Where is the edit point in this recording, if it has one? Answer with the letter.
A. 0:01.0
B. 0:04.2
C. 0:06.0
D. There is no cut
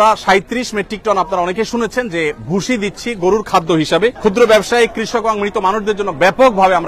B